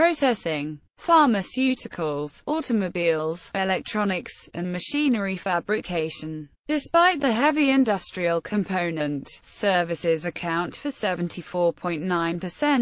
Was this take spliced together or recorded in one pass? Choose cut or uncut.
uncut